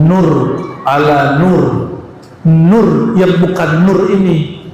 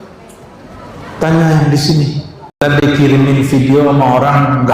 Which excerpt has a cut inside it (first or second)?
second